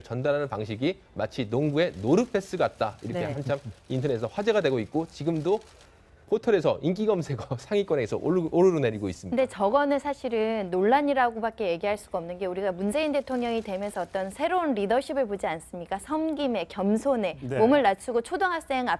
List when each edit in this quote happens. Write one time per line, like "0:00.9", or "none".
0:17.0

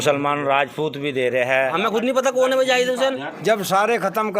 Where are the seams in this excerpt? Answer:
0:01.7
0:03.3

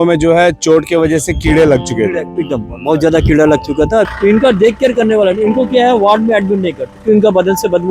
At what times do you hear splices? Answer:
0:04.1
0:06.9

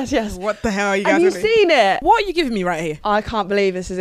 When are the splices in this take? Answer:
0:02.0
0:03.0

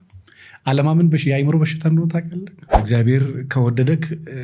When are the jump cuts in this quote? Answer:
0:02.8

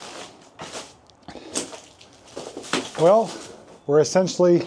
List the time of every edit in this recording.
none

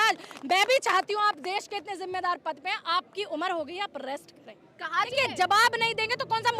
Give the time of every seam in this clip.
0:05.1

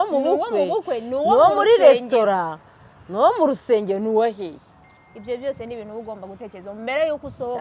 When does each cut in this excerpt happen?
none

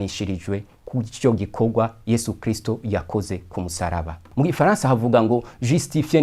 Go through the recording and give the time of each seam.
0:04.2

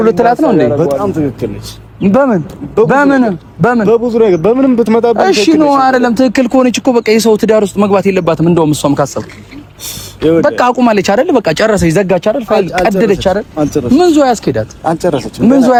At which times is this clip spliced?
none

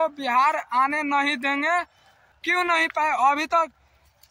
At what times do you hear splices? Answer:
0:02.3

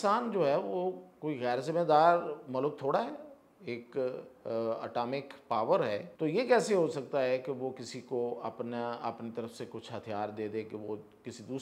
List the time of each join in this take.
0:06.1

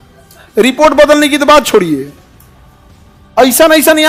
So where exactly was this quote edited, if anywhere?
none

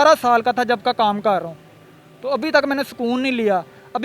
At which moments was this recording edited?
none

